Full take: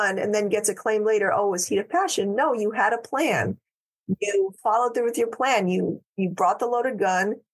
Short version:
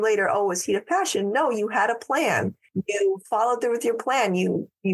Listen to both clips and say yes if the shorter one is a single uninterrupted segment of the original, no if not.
no